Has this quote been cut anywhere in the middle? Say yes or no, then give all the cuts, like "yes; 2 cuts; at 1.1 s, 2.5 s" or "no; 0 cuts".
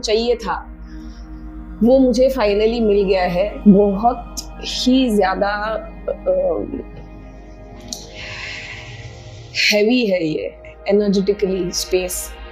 yes; 1 cut; at 3.5 s